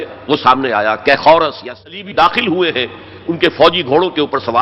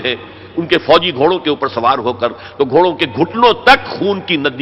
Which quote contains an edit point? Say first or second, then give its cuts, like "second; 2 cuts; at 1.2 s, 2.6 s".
first; 1 cut; at 1.8 s